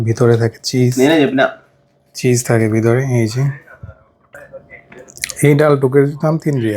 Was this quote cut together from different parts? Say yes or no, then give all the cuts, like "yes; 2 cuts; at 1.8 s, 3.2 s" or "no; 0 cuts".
yes; 1 cut; at 4.4 s